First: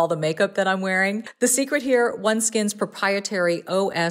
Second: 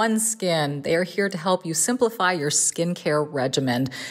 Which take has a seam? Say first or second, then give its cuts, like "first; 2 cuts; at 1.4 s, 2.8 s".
first; 1 cut; at 1.3 s